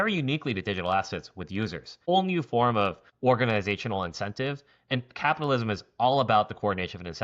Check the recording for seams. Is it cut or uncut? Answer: cut